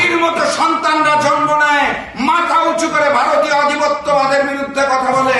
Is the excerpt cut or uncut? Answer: uncut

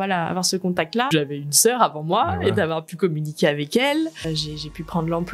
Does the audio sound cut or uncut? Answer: cut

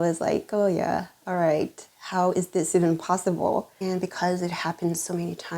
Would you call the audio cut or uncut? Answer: cut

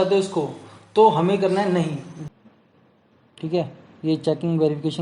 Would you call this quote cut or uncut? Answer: cut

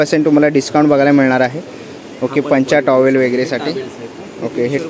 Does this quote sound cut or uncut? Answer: uncut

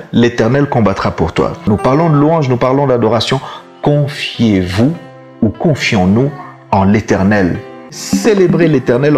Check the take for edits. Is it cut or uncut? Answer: cut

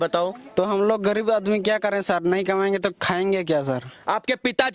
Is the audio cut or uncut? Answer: uncut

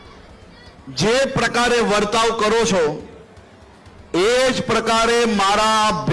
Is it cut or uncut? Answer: uncut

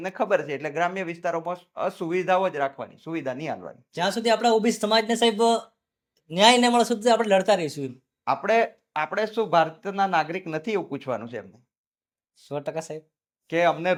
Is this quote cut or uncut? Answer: uncut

